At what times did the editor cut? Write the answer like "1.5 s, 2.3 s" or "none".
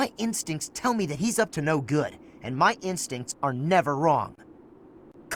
none